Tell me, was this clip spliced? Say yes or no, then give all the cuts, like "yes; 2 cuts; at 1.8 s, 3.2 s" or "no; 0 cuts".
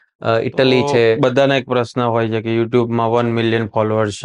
yes; 1 cut; at 1.2 s